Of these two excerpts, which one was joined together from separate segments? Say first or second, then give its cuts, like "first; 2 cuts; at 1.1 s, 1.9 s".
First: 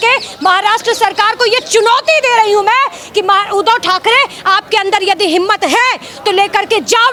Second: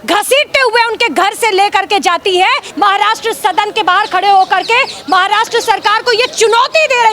second; 1 cut; at 2.7 s